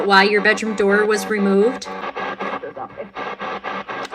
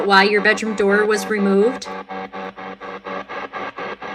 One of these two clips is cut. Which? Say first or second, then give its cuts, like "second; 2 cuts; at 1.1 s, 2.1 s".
first; 1 cut; at 2.0 s